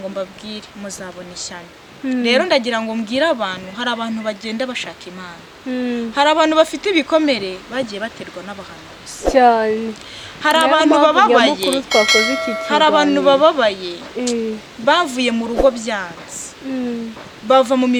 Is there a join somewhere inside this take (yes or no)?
no